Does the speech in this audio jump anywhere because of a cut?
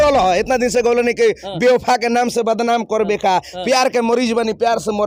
no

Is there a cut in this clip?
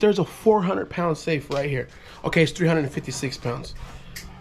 no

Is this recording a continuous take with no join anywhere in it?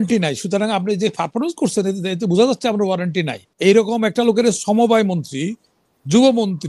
no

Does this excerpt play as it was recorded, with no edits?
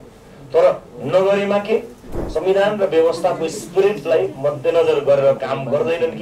no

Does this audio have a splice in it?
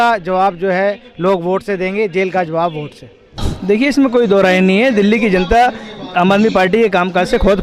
yes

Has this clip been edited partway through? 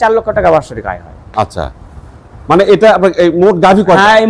no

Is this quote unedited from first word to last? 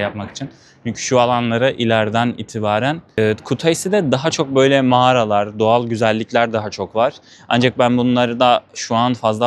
no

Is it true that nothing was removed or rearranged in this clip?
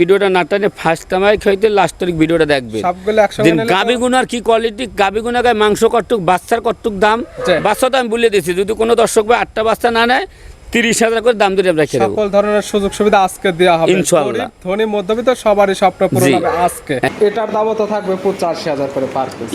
no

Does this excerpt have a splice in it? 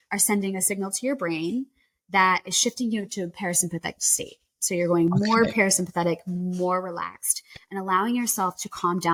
no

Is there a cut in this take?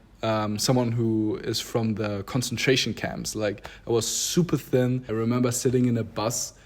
yes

